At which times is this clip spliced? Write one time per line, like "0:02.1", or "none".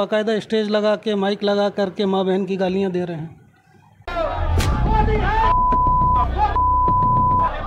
none